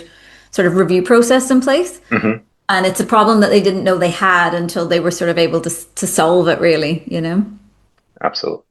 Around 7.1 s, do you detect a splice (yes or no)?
no